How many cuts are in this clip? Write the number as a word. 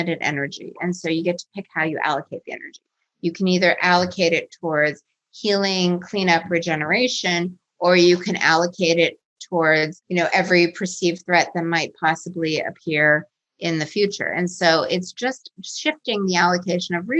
one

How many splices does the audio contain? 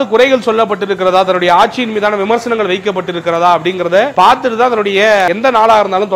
two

